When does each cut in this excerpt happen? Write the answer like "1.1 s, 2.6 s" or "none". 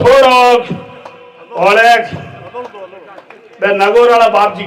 none